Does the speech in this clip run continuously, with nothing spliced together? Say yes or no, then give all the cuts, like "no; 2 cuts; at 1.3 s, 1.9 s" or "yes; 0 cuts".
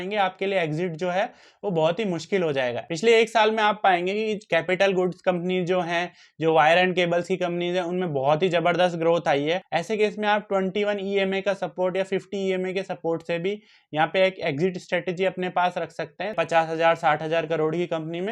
no; 3 cuts; at 2.8 s, 9.6 s, 16.3 s